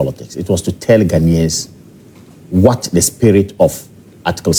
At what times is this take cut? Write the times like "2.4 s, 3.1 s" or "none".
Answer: none